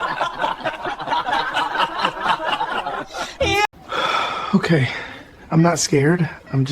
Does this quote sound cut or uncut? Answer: cut